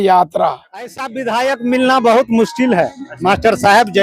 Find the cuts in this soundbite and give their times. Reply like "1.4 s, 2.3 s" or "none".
1.1 s